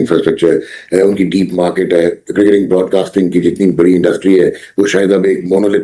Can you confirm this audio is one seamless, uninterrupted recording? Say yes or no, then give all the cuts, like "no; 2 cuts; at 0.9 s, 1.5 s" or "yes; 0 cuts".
yes; 0 cuts